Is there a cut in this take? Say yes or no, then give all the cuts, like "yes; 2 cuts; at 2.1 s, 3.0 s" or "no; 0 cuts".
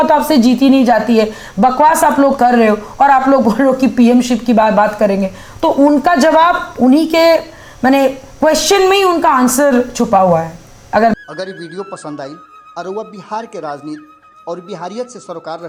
no; 0 cuts